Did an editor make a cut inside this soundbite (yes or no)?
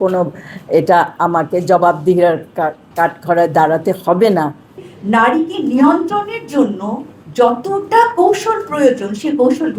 yes